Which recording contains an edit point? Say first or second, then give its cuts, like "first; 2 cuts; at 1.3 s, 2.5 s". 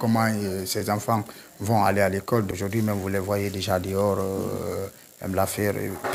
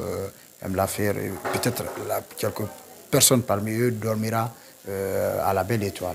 first; 1 cut; at 2.5 s